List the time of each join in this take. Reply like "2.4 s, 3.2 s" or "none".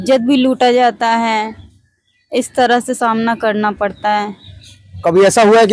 none

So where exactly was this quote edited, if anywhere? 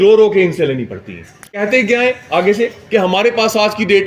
1.6 s

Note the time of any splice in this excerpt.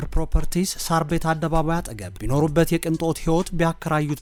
none

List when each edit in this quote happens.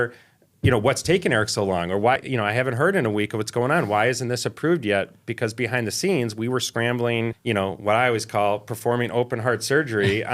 2.2 s, 7.4 s

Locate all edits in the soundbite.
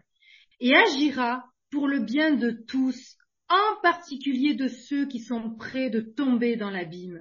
none

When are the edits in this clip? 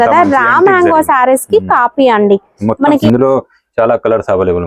3.0 s

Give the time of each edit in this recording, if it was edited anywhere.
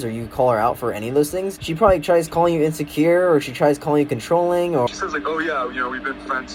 1.6 s, 4.9 s

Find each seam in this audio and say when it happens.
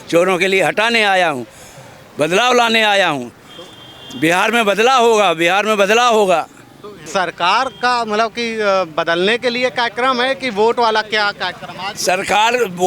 7.0 s

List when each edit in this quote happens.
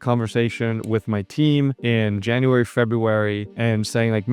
none

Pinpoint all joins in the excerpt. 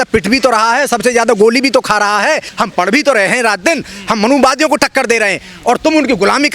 2.5 s

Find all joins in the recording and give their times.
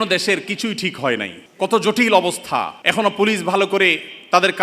1.4 s, 2.8 s

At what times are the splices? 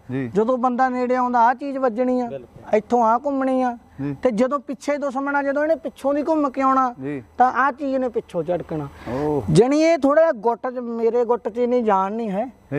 none

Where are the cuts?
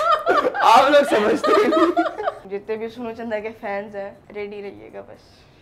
2.5 s, 4.2 s

